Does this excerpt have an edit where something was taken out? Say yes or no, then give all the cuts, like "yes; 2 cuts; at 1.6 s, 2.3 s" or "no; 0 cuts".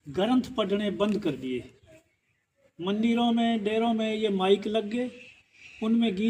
no; 0 cuts